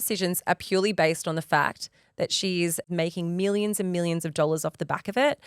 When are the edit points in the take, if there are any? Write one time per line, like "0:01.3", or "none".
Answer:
0:02.9